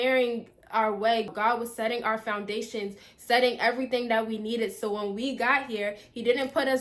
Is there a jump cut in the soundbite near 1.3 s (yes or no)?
yes